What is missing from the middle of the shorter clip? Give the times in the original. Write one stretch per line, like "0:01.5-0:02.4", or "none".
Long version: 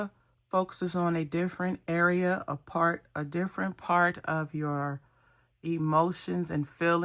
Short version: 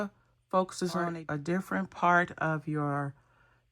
0:01.1-0:03.0